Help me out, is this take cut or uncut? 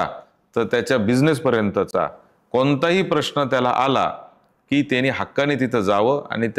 uncut